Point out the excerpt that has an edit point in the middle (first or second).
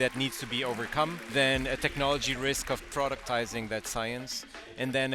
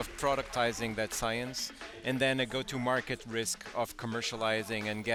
first